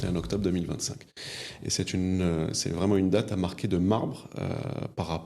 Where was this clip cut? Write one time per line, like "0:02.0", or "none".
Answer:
none